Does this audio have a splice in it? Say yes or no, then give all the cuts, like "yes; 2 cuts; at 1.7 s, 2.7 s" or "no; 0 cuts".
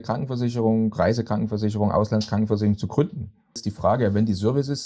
yes; 1 cut; at 3.6 s